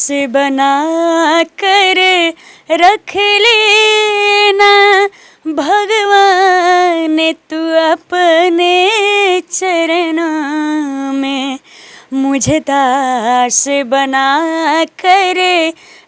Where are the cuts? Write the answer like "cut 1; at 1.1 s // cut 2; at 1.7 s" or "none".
none